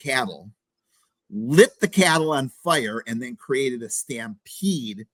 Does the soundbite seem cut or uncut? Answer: uncut